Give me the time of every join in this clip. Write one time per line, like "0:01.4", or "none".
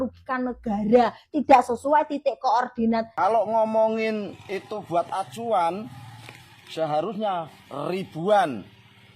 0:03.1